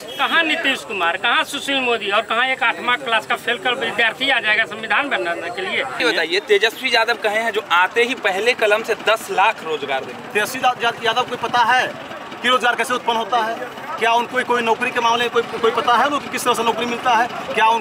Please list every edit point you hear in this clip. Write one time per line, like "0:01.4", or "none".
0:06.0